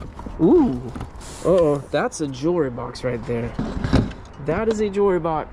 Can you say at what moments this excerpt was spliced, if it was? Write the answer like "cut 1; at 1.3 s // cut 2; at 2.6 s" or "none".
none